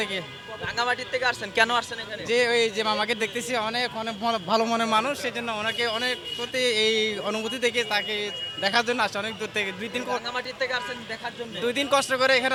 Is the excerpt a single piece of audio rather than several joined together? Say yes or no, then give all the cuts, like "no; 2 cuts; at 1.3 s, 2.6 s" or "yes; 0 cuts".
yes; 0 cuts